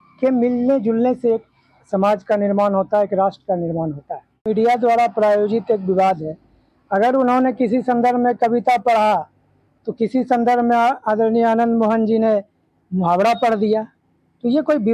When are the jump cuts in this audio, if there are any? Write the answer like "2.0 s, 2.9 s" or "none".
4.5 s